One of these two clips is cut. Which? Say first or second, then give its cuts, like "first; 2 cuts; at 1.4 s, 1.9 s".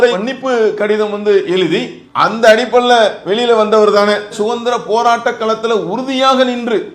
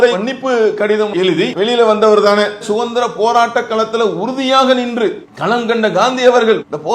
second; 1 cut; at 1.3 s